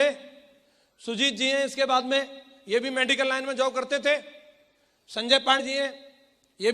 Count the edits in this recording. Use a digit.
1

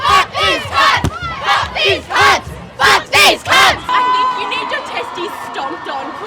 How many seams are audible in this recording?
1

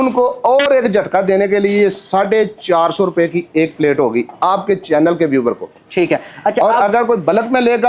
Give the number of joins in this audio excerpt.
0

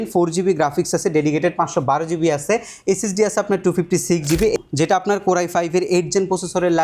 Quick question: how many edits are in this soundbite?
1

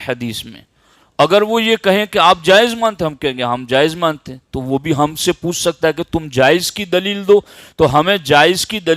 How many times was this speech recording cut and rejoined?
0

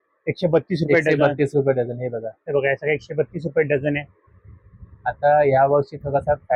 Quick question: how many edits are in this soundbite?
0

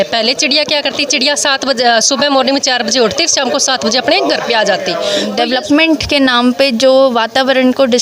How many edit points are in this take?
1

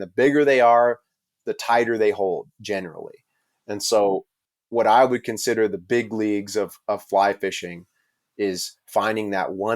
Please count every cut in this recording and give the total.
0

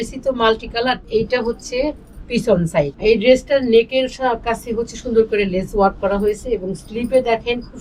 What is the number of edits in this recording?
2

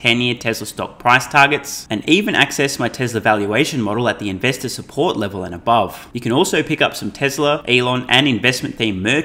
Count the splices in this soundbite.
2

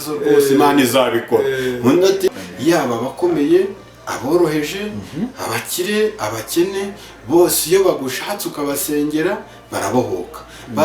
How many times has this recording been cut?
1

